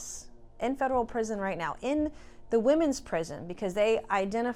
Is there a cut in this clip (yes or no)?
no